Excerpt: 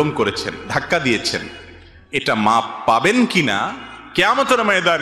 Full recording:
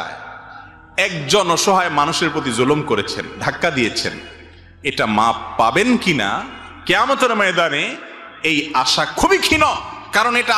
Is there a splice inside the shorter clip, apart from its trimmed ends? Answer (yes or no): no